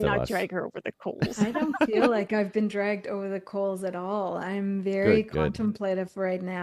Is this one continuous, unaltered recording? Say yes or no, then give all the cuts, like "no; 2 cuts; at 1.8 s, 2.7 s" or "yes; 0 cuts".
yes; 0 cuts